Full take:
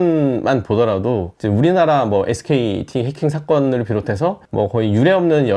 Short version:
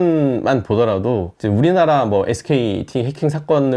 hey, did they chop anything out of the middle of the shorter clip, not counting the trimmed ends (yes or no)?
no